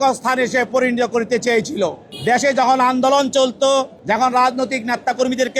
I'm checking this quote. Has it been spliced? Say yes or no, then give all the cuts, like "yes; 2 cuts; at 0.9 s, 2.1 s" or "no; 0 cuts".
yes; 2 cuts; at 2.1 s, 3.9 s